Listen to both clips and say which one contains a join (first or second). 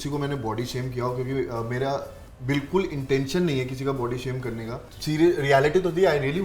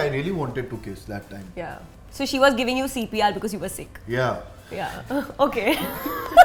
first